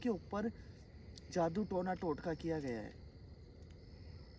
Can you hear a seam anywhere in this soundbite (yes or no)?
no